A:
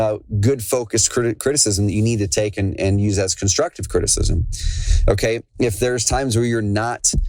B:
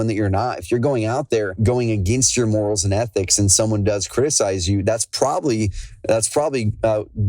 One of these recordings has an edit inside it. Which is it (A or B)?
B